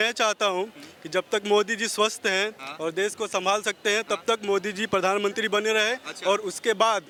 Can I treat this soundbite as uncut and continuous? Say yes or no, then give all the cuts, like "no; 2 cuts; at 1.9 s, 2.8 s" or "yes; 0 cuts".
yes; 0 cuts